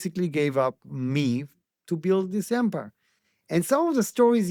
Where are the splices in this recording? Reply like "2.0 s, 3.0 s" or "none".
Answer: none